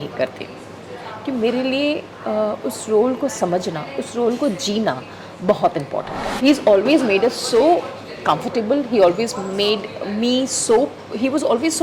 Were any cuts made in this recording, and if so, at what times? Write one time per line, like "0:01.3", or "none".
0:06.2

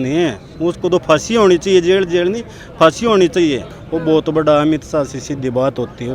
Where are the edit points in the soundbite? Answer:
0:03.7

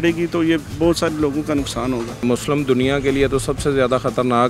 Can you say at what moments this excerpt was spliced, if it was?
0:02.1

